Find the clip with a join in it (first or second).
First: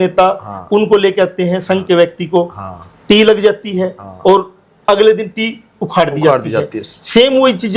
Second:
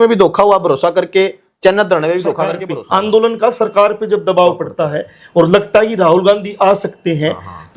second